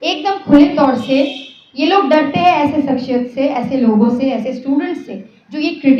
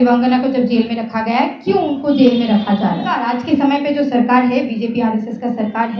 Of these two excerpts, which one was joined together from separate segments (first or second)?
second